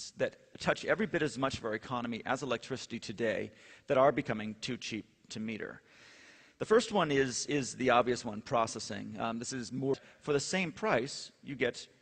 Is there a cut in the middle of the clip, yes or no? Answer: no